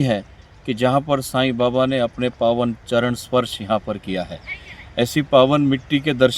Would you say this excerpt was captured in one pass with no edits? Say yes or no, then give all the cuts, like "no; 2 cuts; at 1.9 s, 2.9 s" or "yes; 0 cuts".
yes; 0 cuts